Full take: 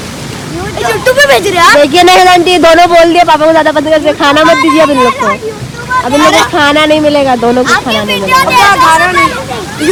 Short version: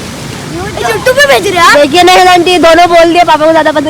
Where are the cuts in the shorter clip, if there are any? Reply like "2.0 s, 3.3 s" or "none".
none